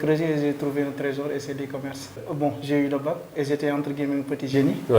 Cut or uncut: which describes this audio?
cut